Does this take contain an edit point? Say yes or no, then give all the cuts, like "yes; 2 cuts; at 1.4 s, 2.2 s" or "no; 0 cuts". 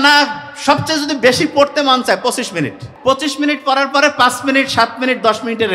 yes; 1 cut; at 2.8 s